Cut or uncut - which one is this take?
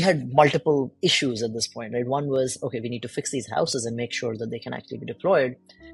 cut